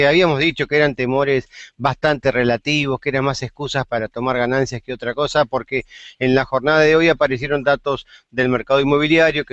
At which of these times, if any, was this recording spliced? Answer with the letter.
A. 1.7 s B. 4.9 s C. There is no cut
C